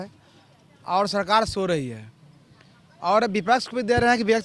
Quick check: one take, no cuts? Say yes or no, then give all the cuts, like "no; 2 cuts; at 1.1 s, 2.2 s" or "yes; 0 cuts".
yes; 0 cuts